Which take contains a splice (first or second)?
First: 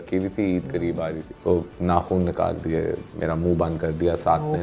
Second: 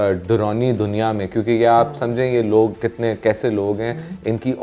first